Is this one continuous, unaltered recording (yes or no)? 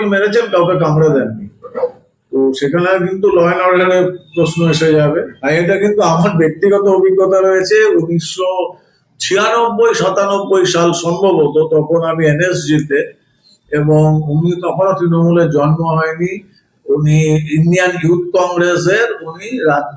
yes